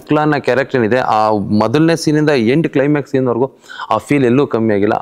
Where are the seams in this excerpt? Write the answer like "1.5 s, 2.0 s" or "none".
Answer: none

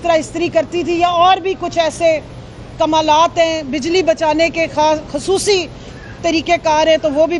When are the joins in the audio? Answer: none

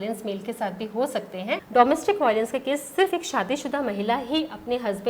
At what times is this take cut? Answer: 1.6 s

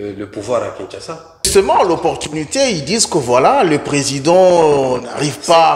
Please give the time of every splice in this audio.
1.5 s

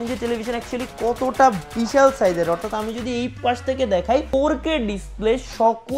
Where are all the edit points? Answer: none

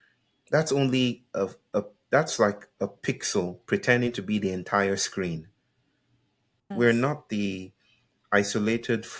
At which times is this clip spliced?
6.7 s

